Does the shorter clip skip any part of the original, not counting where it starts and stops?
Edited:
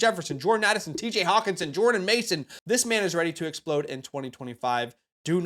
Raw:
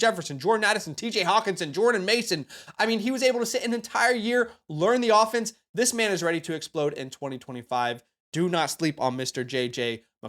yes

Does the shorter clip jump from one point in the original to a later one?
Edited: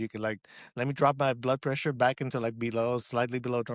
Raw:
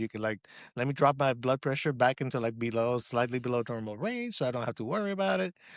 no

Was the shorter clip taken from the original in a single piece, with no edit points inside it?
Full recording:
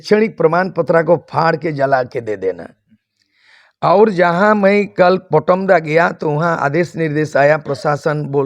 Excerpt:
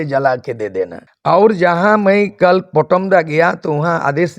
no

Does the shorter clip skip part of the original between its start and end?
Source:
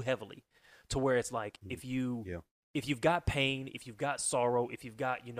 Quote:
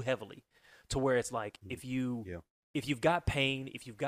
no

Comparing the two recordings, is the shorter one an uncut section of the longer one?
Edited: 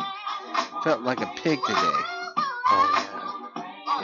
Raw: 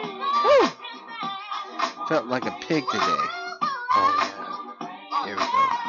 yes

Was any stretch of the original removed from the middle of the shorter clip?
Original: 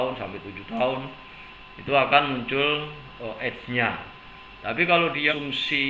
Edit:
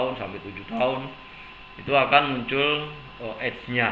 no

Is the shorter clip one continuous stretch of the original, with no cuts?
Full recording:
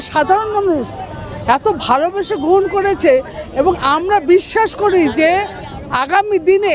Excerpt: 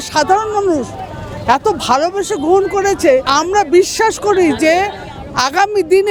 no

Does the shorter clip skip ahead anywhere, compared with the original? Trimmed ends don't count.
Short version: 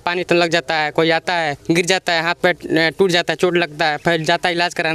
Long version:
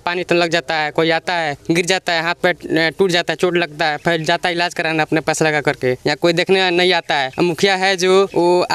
no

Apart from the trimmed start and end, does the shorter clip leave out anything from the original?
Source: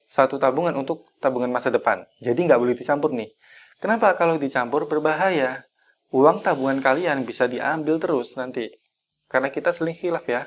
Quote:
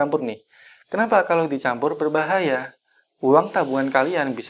no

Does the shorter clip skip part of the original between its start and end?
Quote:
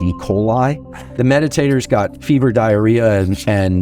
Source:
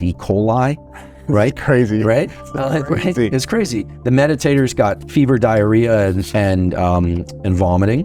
yes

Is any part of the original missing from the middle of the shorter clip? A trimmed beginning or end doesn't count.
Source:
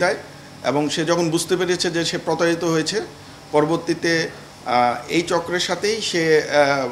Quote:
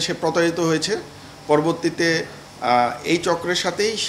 no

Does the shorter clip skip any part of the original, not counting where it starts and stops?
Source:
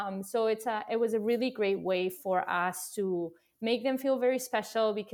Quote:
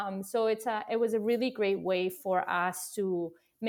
no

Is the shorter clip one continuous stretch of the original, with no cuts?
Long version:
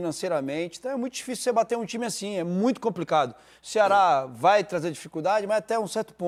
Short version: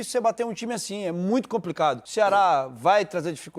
no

